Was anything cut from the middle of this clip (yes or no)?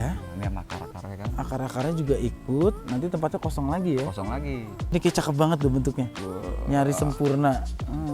yes